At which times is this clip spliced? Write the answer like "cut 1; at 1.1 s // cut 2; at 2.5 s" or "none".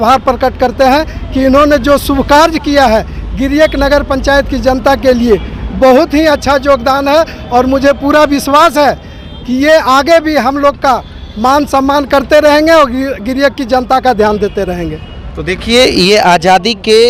none